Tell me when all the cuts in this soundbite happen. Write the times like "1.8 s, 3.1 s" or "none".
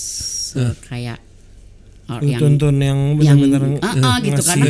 none